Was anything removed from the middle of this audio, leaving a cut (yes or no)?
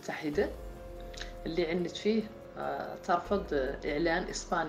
no